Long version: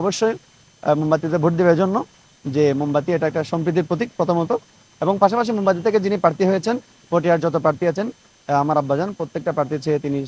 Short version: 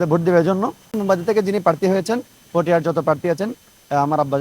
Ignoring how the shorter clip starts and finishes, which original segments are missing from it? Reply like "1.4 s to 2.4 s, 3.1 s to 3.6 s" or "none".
2.3 s to 5.5 s